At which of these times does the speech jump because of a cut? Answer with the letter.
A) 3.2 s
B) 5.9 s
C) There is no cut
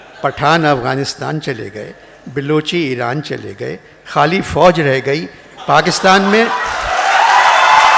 C